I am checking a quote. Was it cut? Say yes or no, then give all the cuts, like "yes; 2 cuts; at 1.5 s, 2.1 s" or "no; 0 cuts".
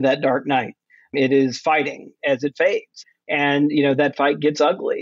yes; 1 cut; at 3.2 s